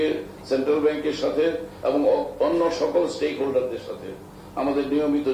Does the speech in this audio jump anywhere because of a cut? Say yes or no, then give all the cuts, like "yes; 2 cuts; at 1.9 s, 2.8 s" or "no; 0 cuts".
no; 0 cuts